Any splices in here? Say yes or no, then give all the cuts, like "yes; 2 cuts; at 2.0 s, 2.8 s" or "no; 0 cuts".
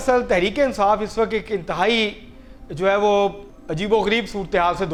no; 0 cuts